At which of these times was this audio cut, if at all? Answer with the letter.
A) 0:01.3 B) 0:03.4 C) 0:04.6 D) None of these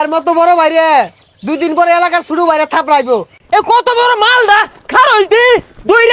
B